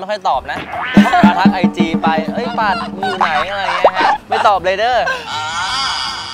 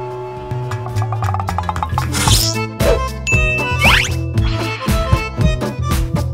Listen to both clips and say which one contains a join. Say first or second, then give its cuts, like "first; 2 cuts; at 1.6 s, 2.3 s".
second; 1 cut; at 2.0 s